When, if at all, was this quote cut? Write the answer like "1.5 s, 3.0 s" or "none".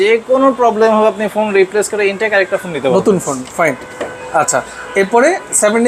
none

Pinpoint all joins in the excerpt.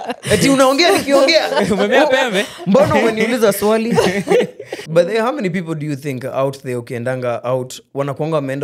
4.8 s

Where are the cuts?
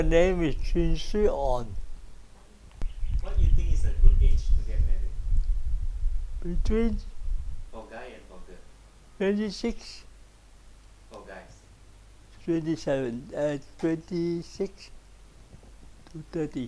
2.9 s

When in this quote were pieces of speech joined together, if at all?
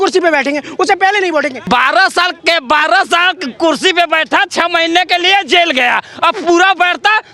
1.6 s

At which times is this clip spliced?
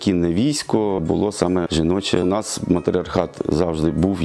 1.2 s

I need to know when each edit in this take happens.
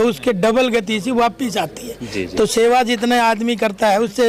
none

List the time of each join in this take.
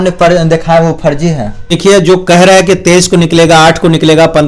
1.6 s

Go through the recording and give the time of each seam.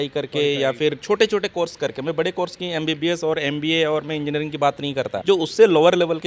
5.2 s

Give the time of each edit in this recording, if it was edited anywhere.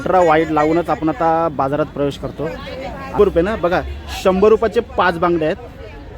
3.2 s

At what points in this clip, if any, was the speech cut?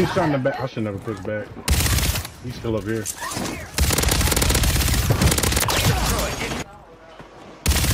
6.6 s

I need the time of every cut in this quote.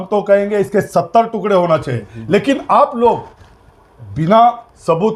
none

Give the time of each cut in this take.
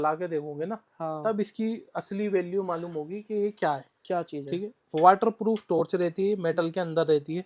none

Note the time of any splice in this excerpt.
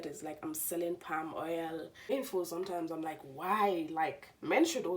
2.1 s

